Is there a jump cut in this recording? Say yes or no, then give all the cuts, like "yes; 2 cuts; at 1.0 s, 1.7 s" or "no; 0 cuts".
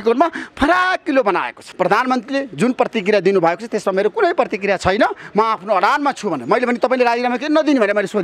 yes; 1 cut; at 1.6 s